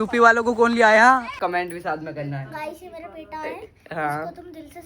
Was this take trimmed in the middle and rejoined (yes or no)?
yes